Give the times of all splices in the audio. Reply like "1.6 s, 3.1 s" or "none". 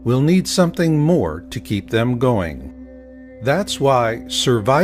3.7 s